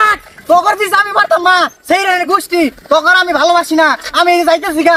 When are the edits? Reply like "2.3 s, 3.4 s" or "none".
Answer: none